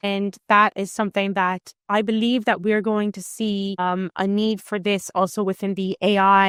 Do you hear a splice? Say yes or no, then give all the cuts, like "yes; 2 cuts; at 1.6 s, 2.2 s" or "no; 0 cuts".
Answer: no; 0 cuts